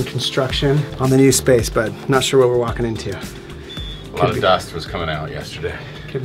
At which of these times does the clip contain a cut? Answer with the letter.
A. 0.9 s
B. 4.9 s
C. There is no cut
A